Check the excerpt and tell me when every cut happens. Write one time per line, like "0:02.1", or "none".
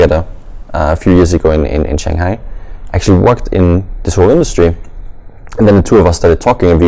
none